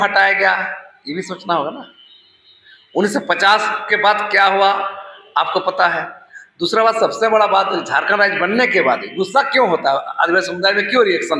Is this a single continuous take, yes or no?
yes